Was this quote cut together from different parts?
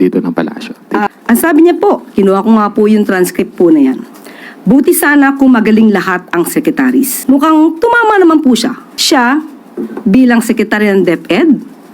yes; 3 cuts; at 1.1 s, 7.2 s, 8.9 s

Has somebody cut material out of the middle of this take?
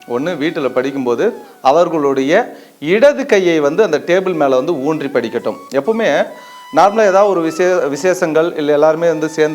no; 0 cuts

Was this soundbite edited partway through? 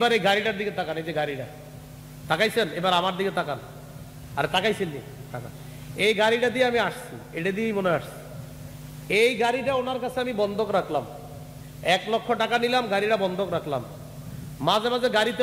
no; 0 cuts

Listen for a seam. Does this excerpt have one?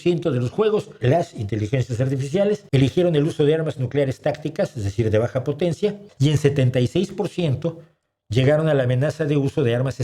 yes; 3 cuts; at 0.9 s, 2.6 s, 6.1 s

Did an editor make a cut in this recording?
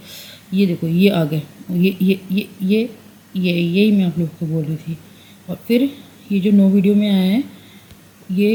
no; 0 cuts

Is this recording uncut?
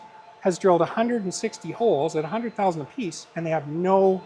yes; 0 cuts

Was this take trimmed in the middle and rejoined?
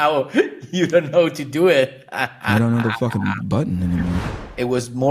yes; 1 cut; at 4.2 s

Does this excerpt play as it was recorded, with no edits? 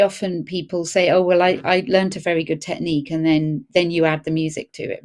yes; 0 cuts

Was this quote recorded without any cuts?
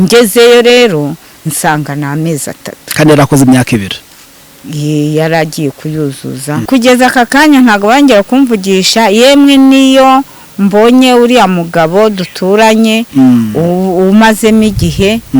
no; 1 cut; at 6.6 s

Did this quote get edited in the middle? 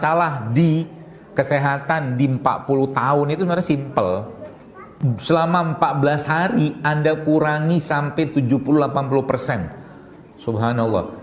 yes; 1 cut; at 4.9 s

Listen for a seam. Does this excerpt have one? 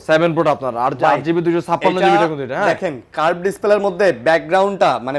no; 0 cuts

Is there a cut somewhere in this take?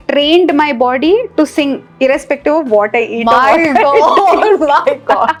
no; 0 cuts

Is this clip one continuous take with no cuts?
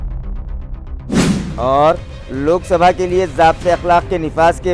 no; 1 cut; at 1.1 s

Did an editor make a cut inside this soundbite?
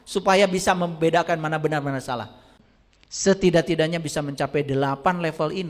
yes; 1 cut; at 2.6 s

